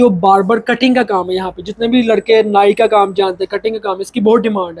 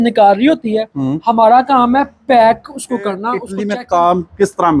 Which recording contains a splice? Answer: second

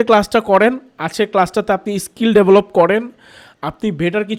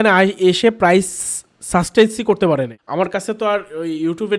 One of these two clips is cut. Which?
second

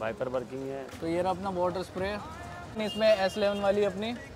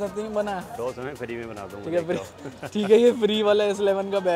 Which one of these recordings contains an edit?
first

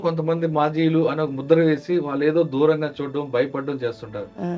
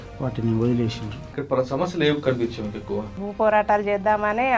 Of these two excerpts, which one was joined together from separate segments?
second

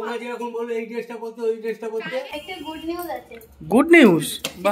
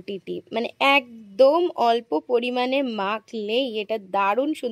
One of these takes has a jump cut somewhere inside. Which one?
first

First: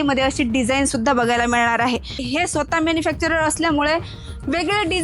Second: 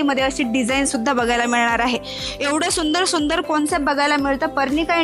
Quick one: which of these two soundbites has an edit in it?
first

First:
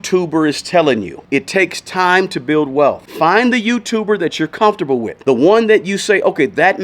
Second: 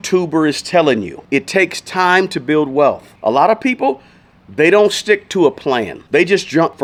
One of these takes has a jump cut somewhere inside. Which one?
first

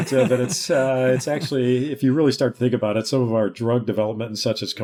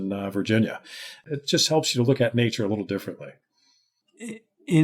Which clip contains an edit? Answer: second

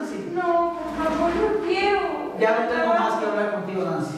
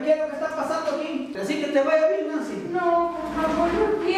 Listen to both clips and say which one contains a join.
second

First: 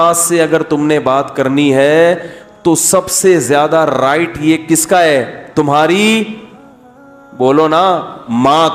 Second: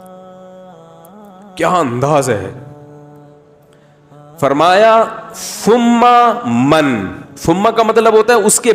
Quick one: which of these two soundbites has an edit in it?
second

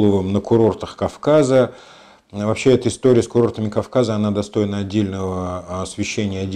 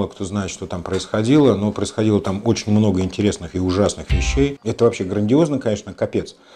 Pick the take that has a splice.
second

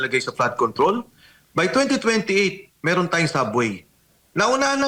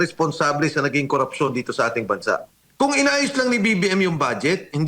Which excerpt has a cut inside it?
second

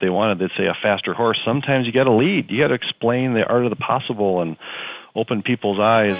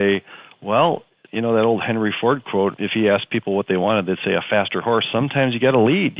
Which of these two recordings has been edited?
second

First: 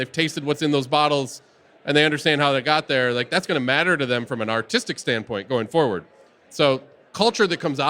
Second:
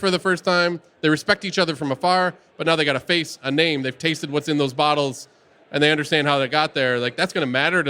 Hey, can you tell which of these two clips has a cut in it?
first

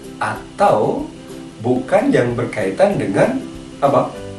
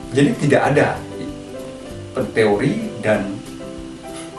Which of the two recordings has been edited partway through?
second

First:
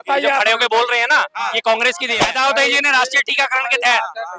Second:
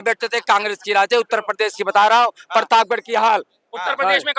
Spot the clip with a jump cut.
first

